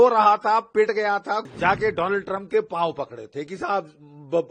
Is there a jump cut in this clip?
yes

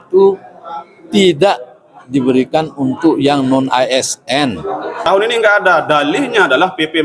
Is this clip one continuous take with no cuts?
no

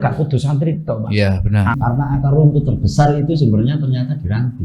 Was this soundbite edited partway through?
yes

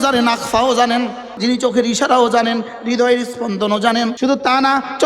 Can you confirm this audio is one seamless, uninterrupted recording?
no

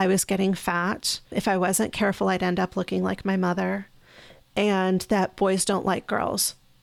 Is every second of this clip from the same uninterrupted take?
no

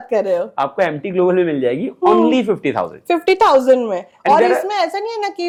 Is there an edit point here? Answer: no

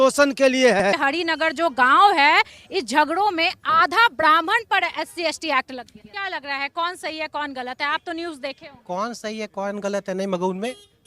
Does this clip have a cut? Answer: yes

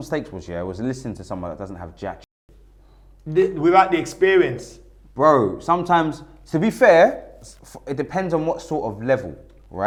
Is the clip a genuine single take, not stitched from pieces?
yes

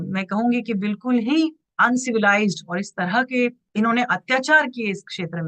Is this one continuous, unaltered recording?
no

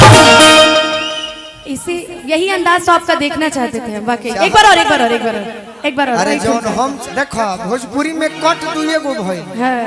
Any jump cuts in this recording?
yes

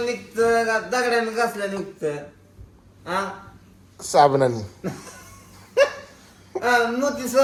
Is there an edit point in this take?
no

